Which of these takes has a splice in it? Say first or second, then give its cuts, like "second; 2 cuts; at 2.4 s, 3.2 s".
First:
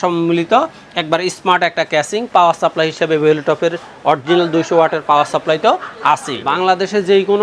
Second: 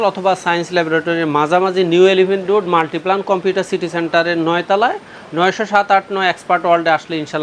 first; 1 cut; at 6.5 s